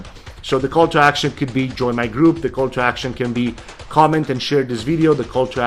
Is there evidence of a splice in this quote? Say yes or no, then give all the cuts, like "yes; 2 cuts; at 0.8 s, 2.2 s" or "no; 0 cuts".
no; 0 cuts